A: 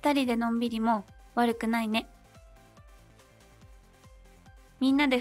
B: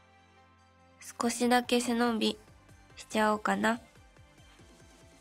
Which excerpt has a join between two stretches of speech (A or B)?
B